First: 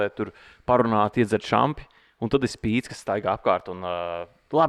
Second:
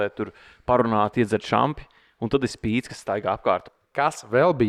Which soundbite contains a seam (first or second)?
second